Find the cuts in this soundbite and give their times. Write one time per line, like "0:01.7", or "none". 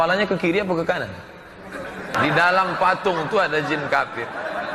0:02.2